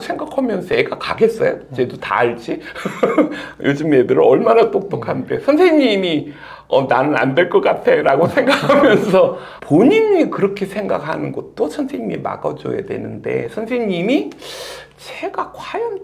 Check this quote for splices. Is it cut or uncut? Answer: uncut